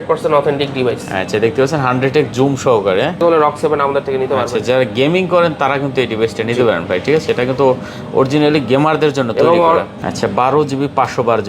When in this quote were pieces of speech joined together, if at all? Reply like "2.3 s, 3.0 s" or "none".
3.2 s, 10.0 s